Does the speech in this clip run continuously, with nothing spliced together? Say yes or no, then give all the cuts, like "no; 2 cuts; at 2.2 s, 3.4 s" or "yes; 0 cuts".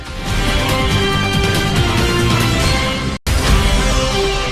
no; 1 cut; at 3.1 s